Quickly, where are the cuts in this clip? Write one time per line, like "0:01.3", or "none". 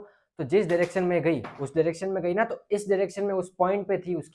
none